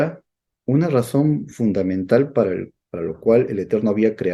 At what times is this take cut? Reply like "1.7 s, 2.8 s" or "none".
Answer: none